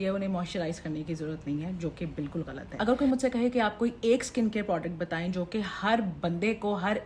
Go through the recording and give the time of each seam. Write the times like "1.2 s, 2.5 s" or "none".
2.6 s